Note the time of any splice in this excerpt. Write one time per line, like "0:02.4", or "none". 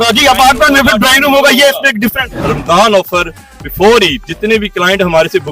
0:02.5
0:04.3